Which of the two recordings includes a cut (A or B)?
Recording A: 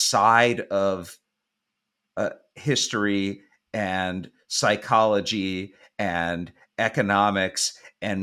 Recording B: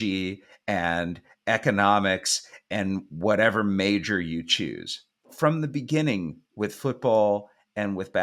B